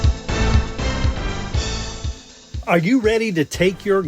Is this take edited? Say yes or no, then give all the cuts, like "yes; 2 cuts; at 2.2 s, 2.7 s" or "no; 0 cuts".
yes; 1 cut; at 2.0 s